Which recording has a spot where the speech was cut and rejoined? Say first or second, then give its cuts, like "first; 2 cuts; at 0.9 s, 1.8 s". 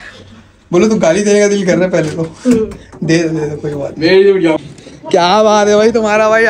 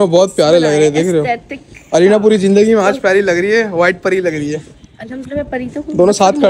first; 1 cut; at 4.6 s